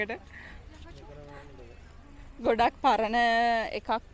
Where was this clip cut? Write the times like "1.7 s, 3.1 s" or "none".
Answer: none